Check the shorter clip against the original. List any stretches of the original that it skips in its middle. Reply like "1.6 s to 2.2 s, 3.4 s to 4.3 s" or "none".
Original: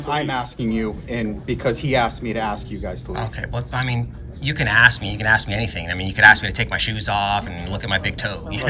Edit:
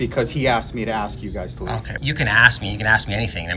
3.4 s to 4.3 s